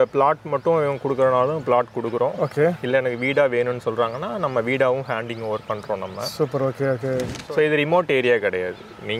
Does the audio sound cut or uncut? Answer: cut